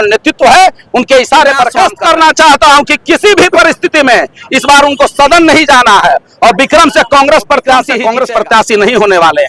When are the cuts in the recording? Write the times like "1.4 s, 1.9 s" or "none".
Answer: 1.7 s, 7.9 s